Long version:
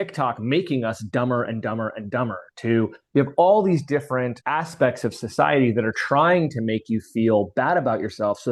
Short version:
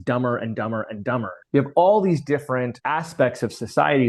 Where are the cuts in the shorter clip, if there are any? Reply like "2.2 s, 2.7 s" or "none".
1.4 s